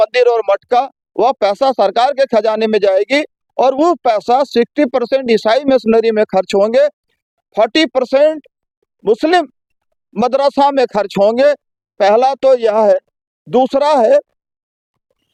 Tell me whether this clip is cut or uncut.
uncut